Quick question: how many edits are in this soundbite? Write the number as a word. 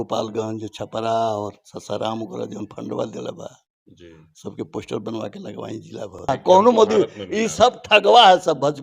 one